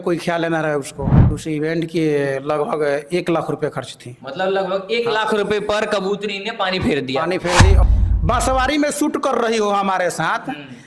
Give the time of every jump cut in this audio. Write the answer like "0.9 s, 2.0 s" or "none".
1.4 s, 7.8 s

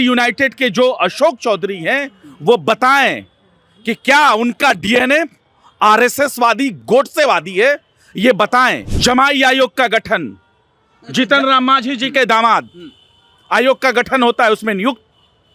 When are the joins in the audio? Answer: 8.9 s

